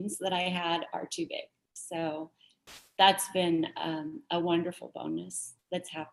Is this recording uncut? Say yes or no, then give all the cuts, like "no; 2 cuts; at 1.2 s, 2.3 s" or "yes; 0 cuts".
yes; 0 cuts